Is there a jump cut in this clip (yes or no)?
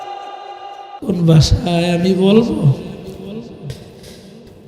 yes